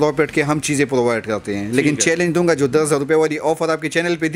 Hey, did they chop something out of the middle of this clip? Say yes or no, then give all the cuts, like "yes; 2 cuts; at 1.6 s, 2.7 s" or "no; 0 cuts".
no; 0 cuts